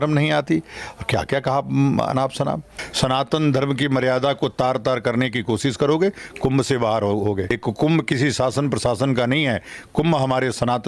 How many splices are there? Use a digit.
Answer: 2